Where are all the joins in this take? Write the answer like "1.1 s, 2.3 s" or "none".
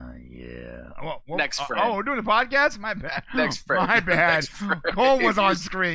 none